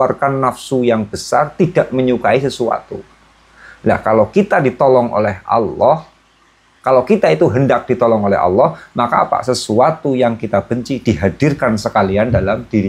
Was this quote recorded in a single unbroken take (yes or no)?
yes